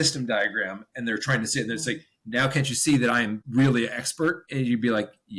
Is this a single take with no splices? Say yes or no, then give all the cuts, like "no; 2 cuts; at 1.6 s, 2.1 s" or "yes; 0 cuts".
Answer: no; 2 cuts; at 3.4 s, 4.4 s